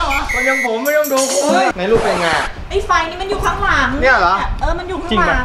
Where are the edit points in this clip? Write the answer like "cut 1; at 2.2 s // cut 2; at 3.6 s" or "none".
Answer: cut 1; at 1.8 s